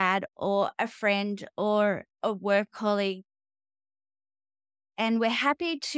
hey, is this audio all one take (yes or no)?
yes